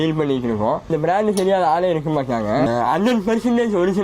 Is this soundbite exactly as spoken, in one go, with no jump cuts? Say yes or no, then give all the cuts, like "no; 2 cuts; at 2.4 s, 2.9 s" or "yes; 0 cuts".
no; 1 cut; at 2.7 s